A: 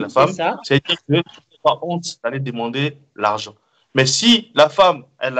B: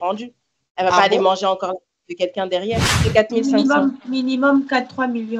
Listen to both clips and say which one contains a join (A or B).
B